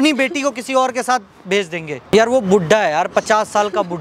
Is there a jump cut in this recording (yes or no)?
yes